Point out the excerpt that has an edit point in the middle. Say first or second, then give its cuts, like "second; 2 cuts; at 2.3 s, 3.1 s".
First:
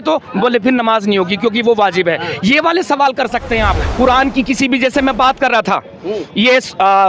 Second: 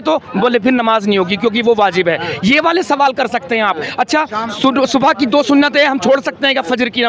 first; 1 cut; at 3.8 s